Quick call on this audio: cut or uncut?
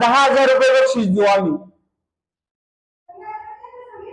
uncut